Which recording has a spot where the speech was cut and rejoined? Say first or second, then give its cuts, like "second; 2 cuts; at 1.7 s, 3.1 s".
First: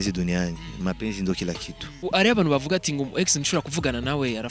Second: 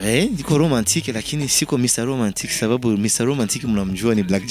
first; 1 cut; at 1.8 s